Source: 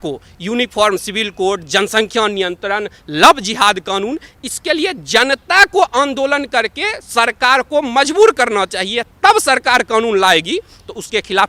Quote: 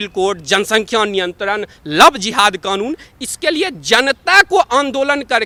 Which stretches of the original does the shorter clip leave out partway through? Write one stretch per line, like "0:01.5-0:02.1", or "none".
none

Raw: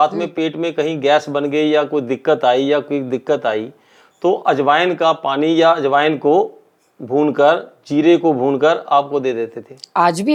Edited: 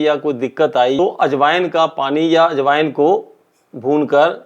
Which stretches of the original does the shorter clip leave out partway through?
0:02.6-0:04.2

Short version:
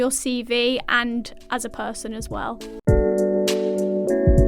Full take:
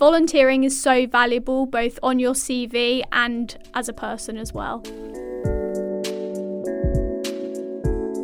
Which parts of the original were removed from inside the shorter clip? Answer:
0:05.1-0:05.4

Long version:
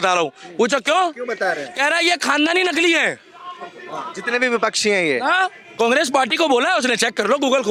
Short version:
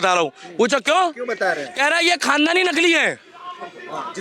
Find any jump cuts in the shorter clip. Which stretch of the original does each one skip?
none

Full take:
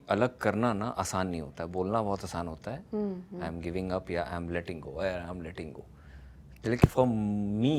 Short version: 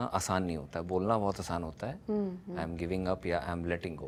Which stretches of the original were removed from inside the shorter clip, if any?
none

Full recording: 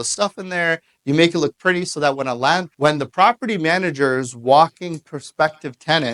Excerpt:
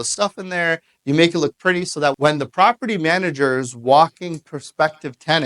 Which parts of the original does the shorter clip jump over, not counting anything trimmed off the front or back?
0:02.2-0:02.8

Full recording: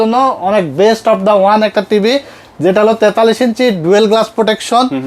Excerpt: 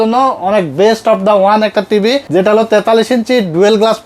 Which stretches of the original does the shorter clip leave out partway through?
0:02.2-0:02.5

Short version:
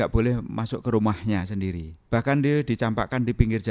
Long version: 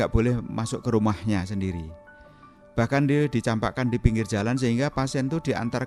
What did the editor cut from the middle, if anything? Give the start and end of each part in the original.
0:01.9-0:02.5

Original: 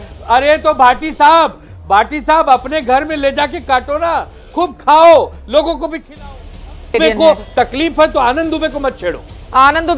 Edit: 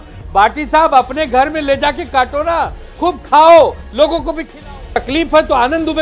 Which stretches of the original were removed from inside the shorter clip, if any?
0:06.6-0:07.7

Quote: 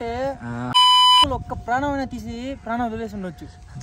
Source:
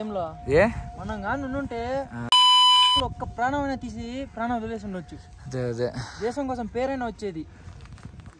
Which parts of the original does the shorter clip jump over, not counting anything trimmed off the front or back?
none

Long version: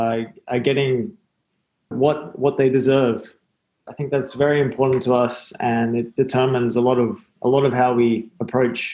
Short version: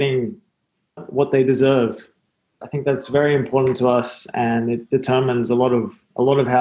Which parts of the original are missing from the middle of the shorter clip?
0:01.8-0:02.3

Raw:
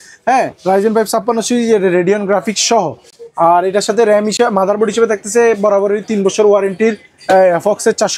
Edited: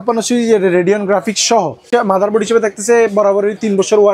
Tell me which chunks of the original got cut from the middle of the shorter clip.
0:03.0-0:04.3

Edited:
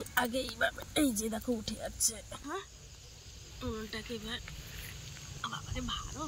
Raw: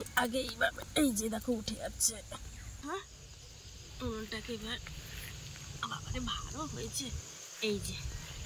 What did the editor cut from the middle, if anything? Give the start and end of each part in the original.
0:02.4-0:02.8

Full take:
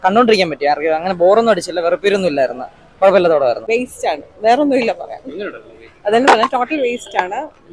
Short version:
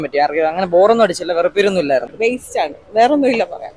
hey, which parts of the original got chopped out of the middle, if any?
0:02.6-0:03.6

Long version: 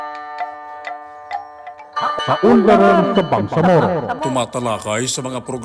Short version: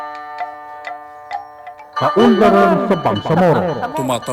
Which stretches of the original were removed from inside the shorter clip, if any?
0:02.0-0:02.3

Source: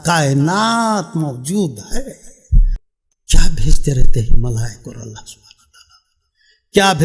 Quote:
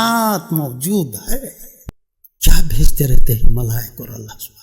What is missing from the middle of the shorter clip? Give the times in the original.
0:02.4-0:02.7

